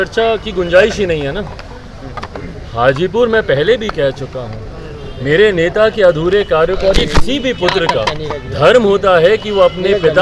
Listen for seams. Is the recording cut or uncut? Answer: uncut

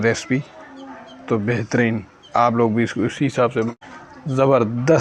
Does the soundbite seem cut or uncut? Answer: cut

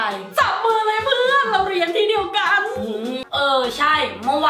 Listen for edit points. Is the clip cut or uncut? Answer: cut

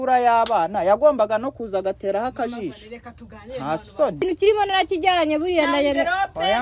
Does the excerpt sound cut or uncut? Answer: cut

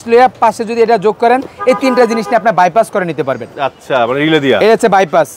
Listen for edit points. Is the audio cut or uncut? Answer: uncut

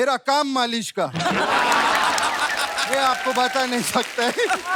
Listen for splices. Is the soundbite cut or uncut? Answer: uncut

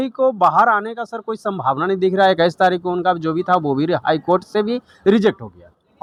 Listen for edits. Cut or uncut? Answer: uncut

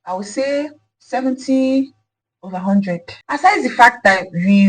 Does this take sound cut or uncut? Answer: cut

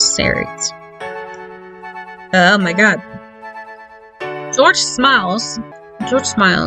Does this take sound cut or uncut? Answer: cut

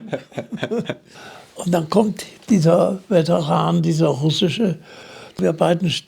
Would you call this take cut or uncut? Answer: cut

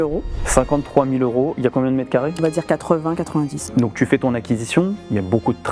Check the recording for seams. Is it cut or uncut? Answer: cut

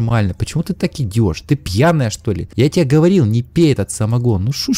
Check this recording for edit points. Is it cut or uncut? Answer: cut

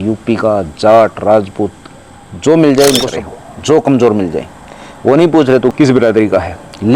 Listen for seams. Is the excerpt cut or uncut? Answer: cut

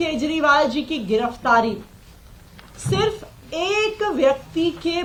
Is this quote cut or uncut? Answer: uncut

